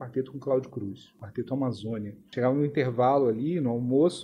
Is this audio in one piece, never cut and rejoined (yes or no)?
no